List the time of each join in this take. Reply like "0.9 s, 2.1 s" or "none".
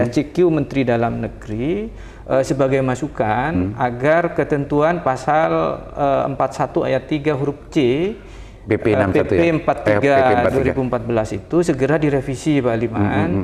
none